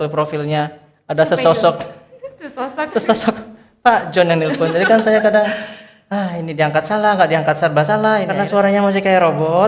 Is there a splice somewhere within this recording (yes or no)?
yes